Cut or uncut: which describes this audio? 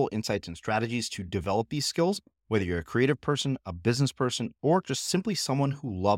uncut